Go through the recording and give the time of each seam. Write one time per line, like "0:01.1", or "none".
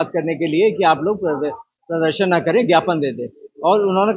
none